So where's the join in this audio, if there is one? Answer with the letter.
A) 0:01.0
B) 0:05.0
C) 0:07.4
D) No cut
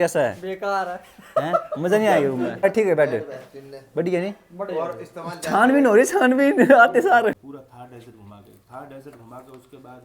C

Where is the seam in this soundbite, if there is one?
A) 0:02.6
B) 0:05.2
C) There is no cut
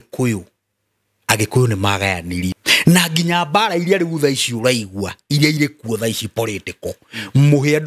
A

